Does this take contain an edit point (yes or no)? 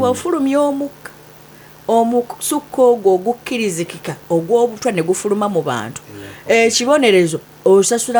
no